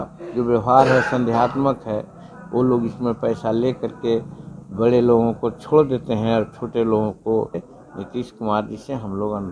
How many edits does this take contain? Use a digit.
1